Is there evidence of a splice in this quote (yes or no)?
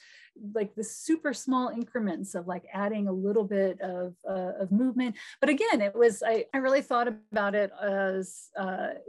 yes